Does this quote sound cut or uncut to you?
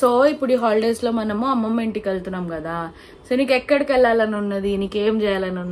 uncut